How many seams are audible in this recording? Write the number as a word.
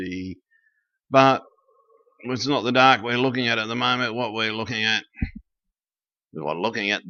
zero